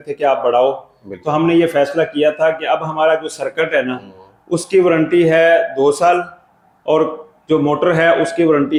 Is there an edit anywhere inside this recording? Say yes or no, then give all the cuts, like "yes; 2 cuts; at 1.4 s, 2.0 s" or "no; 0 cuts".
no; 0 cuts